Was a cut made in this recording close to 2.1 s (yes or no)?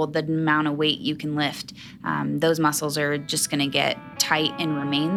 no